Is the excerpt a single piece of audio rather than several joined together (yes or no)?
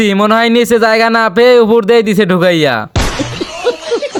yes